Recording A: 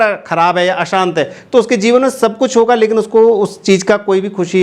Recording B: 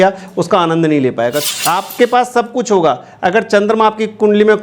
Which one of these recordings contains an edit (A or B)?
B